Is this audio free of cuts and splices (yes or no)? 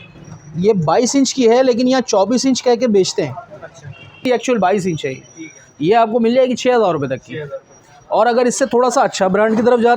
no